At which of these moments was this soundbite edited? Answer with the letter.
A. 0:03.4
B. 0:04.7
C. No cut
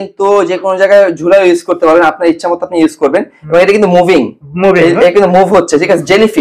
C